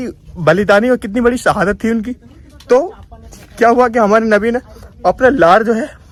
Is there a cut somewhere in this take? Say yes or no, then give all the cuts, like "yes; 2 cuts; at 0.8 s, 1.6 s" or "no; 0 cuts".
no; 0 cuts